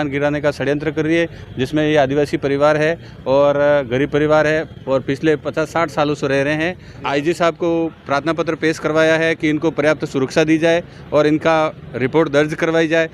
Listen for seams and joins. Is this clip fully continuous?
no; 1 cut; at 6.9 s

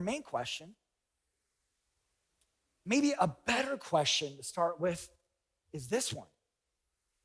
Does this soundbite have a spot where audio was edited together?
no; 0 cuts

